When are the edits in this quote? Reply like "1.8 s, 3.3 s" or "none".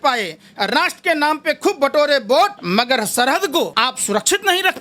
2.6 s, 3.7 s

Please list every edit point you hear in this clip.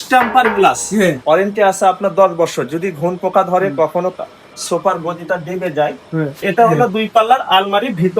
1.2 s, 6.4 s

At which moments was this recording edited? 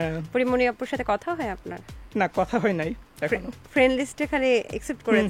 none

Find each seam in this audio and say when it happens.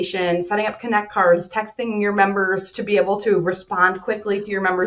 2.7 s

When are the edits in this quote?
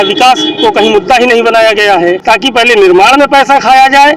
2.2 s

